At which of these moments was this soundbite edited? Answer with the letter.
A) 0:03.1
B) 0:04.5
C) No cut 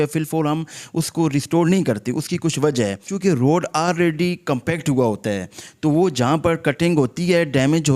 A